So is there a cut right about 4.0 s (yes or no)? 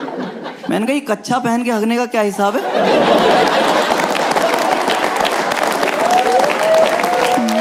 no